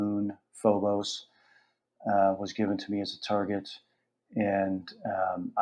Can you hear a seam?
no; 0 cuts

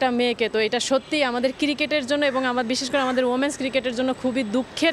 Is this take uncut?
yes; 0 cuts

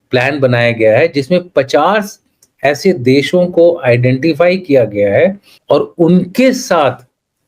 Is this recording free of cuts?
no; 1 cut; at 5.5 s

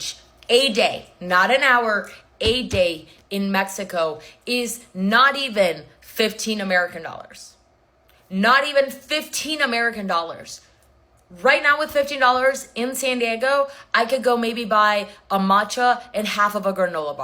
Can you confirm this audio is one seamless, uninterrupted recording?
no; 1 cut; at 2.0 s

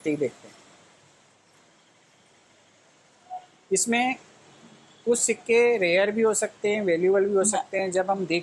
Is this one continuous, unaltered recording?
yes; 0 cuts

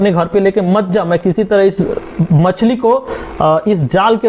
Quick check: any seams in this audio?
no; 0 cuts

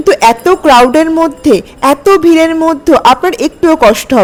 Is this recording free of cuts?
yes; 0 cuts

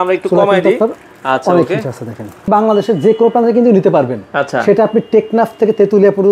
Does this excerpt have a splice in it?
yes; 1 cut; at 2.5 s

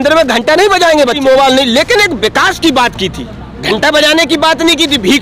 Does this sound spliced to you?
yes; 1 cut; at 1.2 s

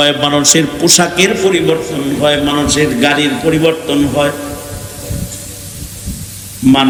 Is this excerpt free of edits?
yes; 0 cuts

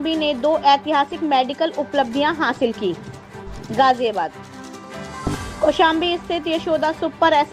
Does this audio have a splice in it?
no; 0 cuts

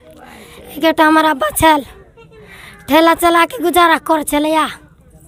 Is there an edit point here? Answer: no; 0 cuts

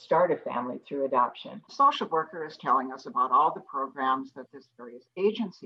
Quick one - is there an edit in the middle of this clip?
yes; 1 cut; at 1.6 s

